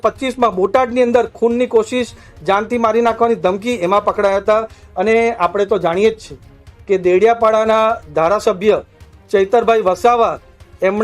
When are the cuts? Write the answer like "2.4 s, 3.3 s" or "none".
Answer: none